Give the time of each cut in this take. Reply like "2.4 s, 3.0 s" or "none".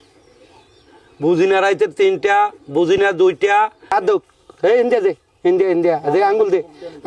3.9 s